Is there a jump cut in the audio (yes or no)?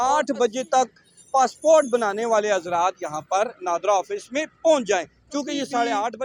no